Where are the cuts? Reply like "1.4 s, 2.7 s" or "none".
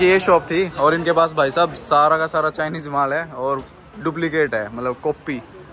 none